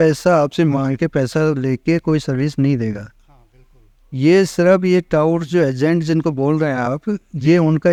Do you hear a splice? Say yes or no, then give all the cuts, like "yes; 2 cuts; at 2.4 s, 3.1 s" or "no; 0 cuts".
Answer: no; 0 cuts